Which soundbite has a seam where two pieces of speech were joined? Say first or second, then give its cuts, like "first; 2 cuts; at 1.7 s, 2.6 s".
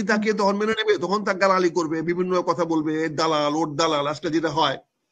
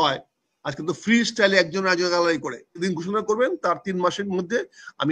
second; 1 cut; at 2.8 s